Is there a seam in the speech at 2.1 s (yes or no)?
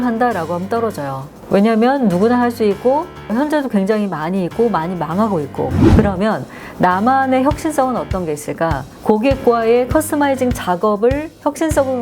no